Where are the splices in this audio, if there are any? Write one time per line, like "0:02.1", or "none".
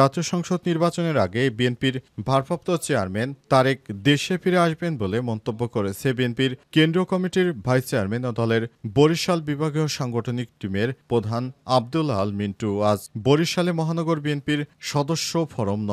none